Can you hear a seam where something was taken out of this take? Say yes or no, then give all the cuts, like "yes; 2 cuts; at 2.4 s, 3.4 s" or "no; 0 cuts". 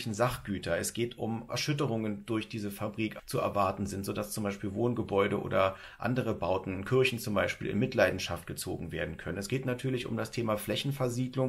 yes; 2 cuts; at 1.5 s, 3.2 s